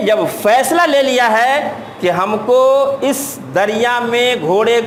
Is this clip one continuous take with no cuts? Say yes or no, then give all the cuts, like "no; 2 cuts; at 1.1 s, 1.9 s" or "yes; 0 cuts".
yes; 0 cuts